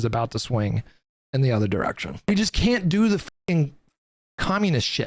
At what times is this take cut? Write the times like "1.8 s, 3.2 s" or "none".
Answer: 2.2 s